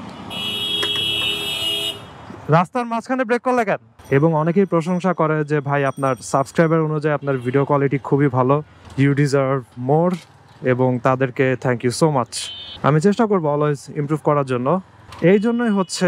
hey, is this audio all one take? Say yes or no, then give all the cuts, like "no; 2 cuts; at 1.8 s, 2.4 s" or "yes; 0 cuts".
no; 1 cut; at 3.9 s